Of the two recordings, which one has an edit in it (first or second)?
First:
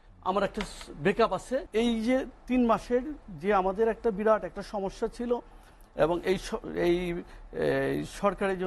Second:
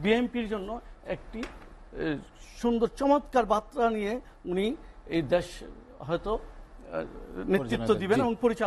first